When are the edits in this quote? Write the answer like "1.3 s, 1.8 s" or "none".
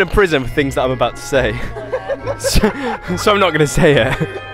none